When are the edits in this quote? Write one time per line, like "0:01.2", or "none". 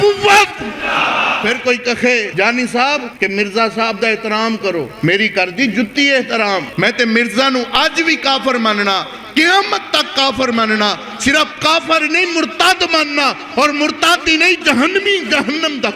0:01.3
0:02.3
0:03.1
0:04.9
0:06.7